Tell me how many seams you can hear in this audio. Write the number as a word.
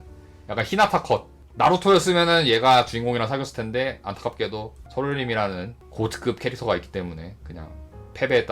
one